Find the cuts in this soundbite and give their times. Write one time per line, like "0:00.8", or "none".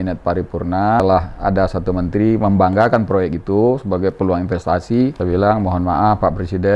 0:01.0
0:05.2